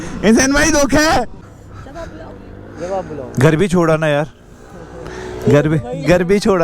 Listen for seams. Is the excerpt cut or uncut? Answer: cut